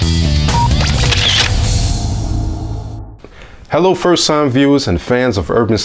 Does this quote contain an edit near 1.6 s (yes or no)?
no